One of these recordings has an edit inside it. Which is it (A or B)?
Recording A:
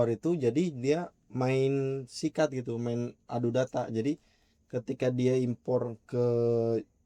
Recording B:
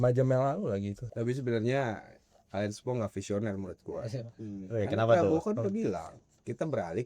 B